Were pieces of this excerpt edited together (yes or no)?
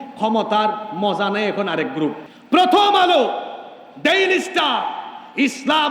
yes